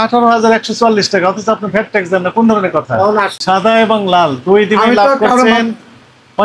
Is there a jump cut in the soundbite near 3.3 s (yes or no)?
yes